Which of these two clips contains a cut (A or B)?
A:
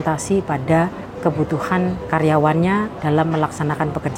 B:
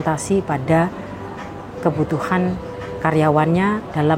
A